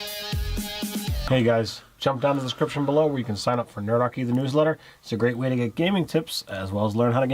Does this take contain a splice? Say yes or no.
yes